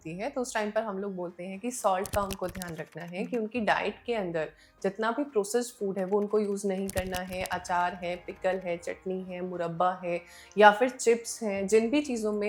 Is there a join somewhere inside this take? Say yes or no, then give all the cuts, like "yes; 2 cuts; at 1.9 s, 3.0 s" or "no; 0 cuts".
no; 0 cuts